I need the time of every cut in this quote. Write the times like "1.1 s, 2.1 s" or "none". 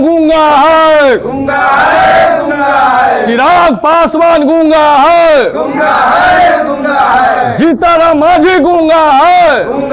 none